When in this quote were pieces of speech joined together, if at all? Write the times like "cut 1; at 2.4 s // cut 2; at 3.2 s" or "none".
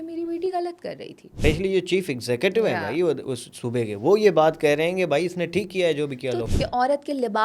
cut 1; at 1.2 s // cut 2; at 6.4 s